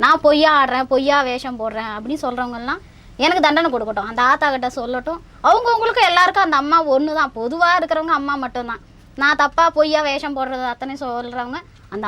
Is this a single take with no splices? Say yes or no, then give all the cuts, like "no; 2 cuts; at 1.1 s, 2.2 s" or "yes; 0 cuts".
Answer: yes; 0 cuts